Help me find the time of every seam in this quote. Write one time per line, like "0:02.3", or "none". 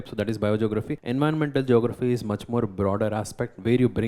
0:01.0